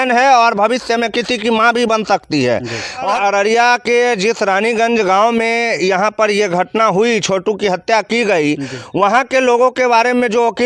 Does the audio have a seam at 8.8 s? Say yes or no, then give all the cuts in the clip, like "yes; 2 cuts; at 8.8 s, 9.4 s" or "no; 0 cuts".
no; 1 cut; at 3.1 s